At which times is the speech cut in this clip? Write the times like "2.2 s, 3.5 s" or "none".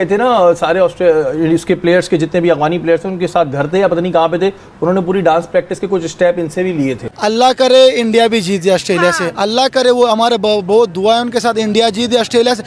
7.1 s

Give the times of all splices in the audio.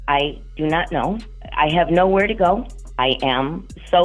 1.4 s, 2.8 s

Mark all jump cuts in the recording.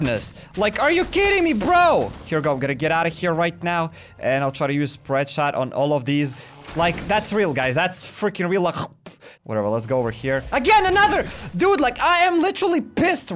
2.2 s, 9.3 s

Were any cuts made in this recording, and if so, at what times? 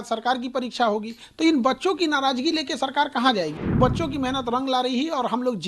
3.8 s

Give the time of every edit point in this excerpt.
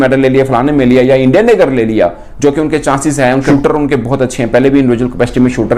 3.5 s

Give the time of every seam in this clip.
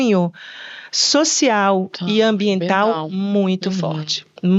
none

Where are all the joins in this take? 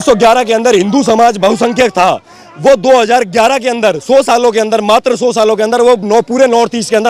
none

